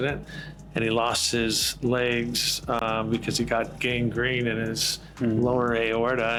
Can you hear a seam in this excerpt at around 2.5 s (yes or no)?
no